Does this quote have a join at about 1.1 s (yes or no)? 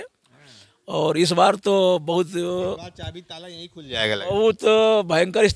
no